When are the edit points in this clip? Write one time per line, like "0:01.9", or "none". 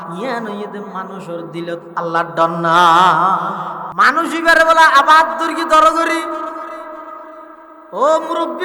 0:03.9